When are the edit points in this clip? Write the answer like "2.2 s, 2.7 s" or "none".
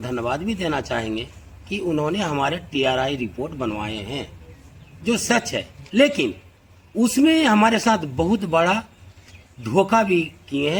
none